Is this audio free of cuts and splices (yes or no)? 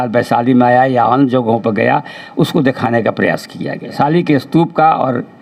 no